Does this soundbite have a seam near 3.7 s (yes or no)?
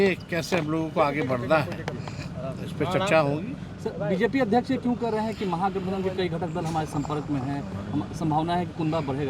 no